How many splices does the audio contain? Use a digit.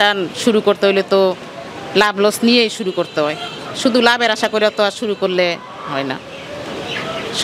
0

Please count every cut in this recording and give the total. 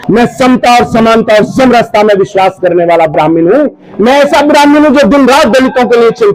0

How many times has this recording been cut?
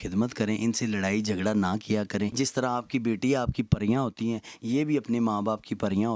1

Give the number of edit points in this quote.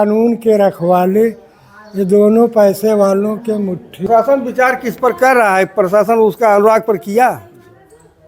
1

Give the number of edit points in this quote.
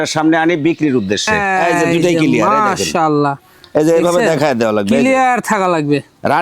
1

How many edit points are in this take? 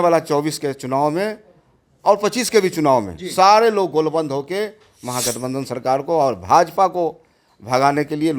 0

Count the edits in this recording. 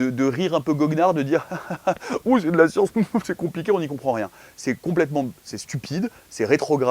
0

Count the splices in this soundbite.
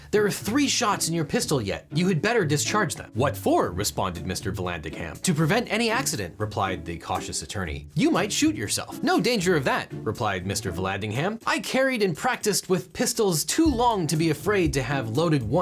0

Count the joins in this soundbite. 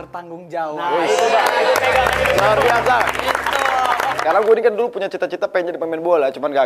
1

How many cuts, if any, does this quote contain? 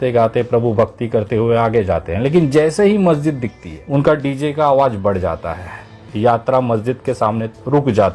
1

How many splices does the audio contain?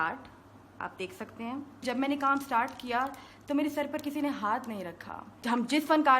2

